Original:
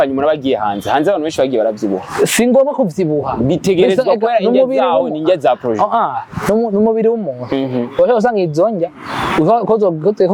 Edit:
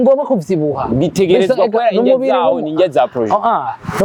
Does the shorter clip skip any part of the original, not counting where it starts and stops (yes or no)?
no